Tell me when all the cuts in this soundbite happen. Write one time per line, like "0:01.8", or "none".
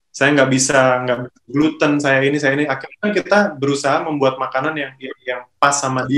none